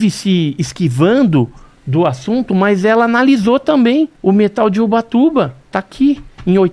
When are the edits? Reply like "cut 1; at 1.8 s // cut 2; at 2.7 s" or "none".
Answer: cut 1; at 4.1 s